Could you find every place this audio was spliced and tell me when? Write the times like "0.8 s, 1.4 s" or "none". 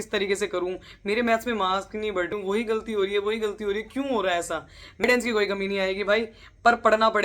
2.3 s, 5.0 s